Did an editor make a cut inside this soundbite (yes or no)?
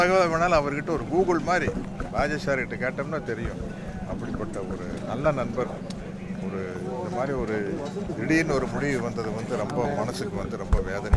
no